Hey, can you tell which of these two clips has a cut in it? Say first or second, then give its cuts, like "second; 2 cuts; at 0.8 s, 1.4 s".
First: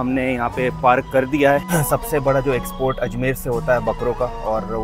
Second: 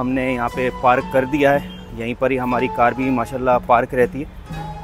first; 1 cut; at 1.7 s